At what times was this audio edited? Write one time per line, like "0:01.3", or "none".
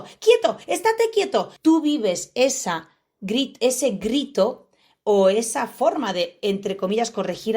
0:01.5

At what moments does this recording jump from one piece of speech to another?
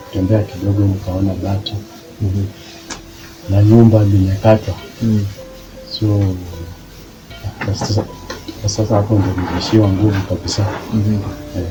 none

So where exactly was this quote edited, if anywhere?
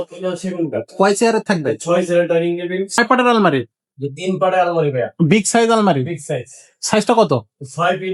0:03.0

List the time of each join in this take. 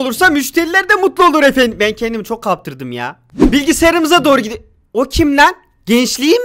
0:03.3

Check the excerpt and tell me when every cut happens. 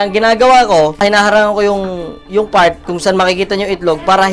0:01.0

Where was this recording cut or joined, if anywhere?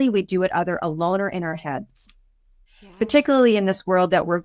none

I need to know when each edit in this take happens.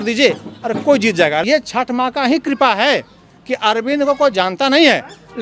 0:01.4

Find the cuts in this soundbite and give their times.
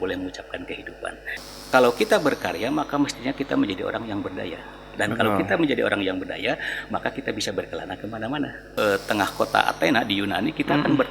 0:01.3
0:08.7

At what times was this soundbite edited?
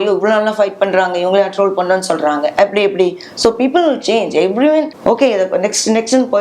0:04.9

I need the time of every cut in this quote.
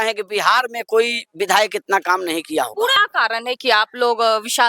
0:03.0

